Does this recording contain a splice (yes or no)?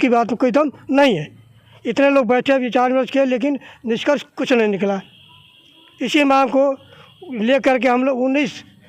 no